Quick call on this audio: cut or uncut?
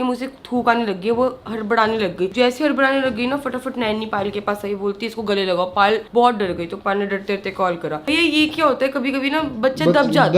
uncut